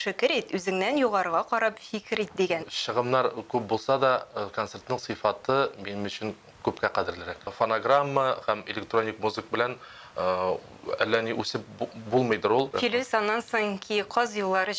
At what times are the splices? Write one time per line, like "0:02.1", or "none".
0:02.7
0:07.5
0:12.7